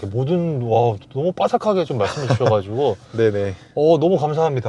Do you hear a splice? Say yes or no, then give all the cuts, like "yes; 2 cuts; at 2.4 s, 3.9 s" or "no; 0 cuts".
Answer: no; 0 cuts